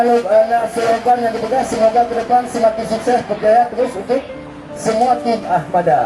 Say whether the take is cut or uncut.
uncut